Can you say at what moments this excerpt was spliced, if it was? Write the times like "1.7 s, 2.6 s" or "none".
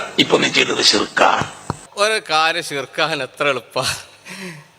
1.8 s